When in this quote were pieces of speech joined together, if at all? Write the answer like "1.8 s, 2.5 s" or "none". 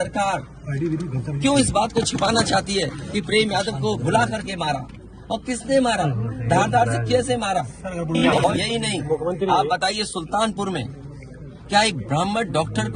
8.4 s